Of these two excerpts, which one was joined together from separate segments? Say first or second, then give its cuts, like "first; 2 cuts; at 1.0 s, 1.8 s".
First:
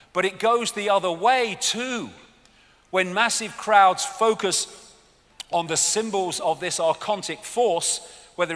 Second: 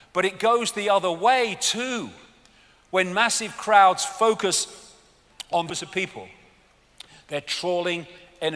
first; 1 cut; at 5.7 s